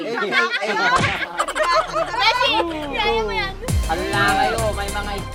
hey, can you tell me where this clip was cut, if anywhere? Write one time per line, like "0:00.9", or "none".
none